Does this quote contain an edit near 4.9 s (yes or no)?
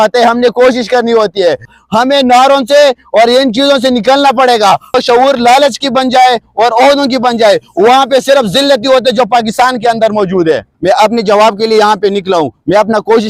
yes